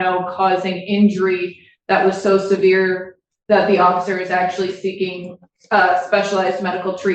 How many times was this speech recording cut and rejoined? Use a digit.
0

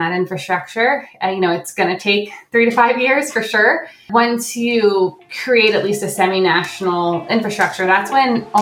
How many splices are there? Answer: 2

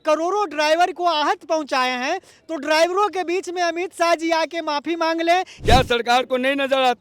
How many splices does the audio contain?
1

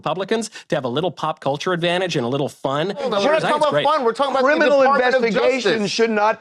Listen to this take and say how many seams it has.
1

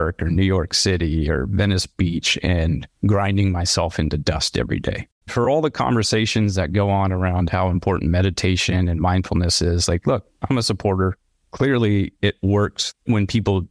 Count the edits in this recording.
1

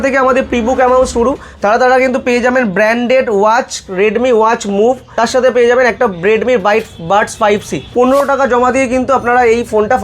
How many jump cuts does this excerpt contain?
2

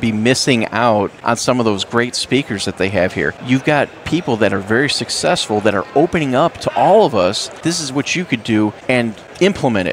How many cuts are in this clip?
4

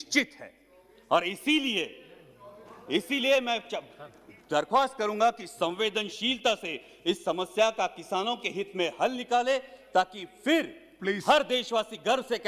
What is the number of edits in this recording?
0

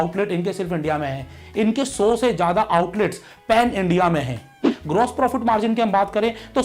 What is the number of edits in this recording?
1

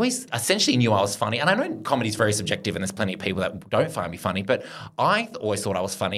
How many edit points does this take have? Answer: 0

